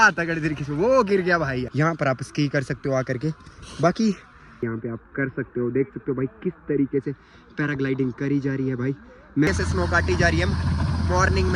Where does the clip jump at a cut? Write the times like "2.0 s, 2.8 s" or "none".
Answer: 1.7 s, 4.6 s, 9.5 s

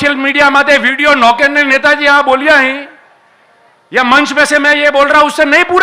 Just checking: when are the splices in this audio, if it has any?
none

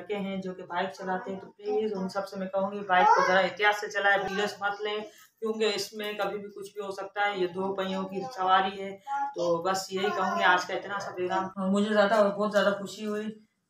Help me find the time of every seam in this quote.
4.3 s, 11.6 s

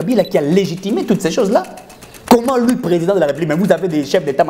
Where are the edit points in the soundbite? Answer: none

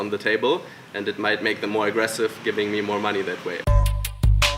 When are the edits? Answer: 3.6 s

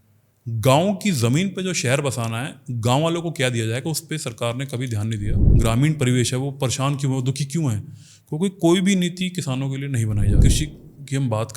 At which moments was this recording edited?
5.4 s, 10.3 s

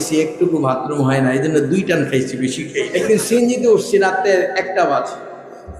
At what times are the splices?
2.9 s

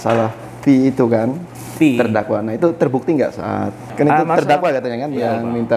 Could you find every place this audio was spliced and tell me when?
3.9 s

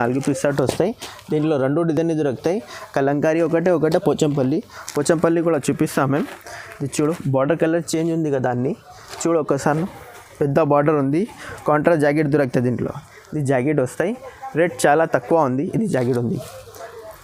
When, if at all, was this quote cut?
none

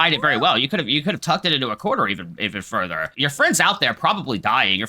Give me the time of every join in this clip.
3.1 s

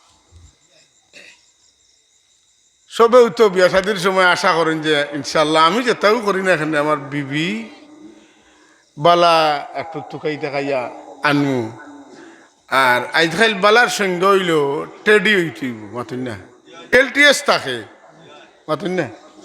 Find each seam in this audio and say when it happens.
16.9 s

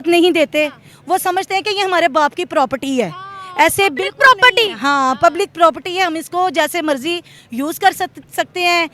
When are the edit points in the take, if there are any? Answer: none

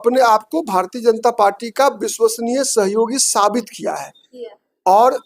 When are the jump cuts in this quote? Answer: none

